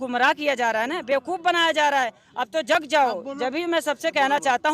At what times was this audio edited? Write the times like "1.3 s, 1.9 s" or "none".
none